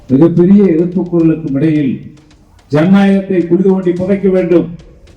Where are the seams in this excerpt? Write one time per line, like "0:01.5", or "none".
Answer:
none